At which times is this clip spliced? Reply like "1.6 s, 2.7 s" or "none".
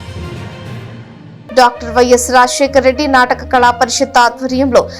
1.3 s